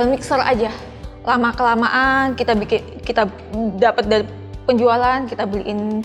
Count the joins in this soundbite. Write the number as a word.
one